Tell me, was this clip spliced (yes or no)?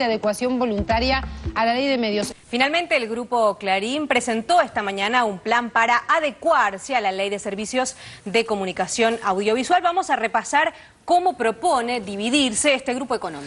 no